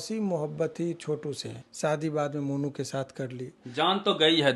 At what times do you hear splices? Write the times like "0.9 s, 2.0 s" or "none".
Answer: 1.5 s, 3.6 s